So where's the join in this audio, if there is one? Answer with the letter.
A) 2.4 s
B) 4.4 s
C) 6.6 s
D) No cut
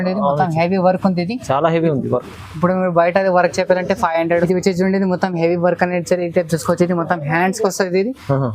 B